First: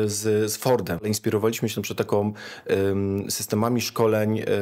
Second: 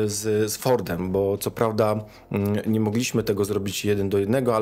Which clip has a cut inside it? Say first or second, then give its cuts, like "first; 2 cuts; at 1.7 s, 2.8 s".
first; 1 cut; at 1.0 s